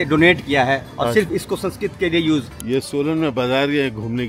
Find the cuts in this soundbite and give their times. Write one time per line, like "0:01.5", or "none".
0:02.6